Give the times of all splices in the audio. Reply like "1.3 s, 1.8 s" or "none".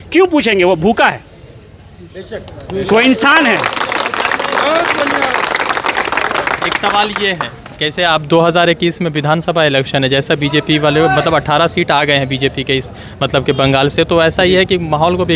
none